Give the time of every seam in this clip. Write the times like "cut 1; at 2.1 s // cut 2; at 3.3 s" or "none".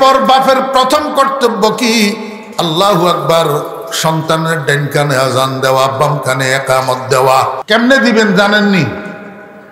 cut 1; at 7.6 s

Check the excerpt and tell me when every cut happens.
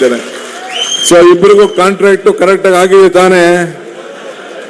none

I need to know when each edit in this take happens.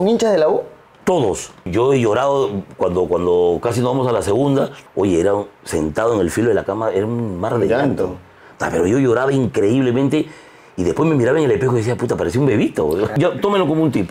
cut 1; at 1.7 s // cut 2; at 4.8 s // cut 3; at 13.1 s

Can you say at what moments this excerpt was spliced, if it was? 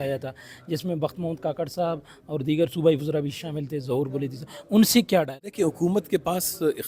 cut 1; at 5.4 s

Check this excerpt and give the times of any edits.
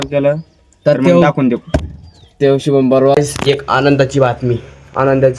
cut 1; at 3.2 s

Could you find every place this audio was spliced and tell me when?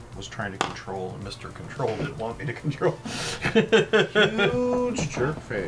none

